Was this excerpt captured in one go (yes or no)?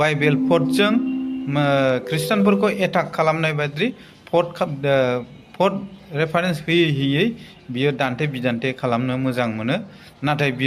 yes